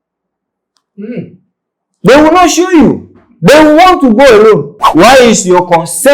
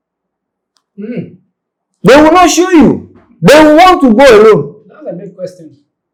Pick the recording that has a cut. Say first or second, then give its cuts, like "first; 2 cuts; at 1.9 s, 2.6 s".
first; 1 cut; at 4.8 s